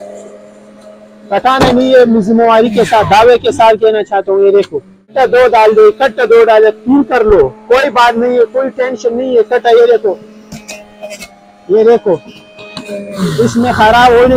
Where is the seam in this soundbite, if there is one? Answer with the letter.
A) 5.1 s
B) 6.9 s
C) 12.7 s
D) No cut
A